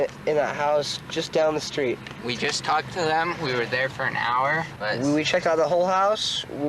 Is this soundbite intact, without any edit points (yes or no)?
no